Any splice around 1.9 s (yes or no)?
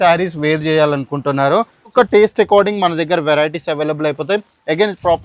yes